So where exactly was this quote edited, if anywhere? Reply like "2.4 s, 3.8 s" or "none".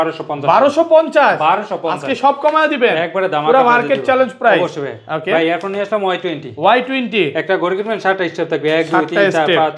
none